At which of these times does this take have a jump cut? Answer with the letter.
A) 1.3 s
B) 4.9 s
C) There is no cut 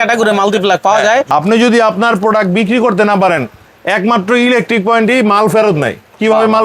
A